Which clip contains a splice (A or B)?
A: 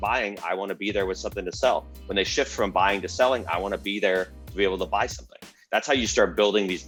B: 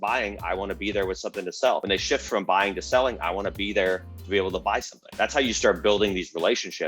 B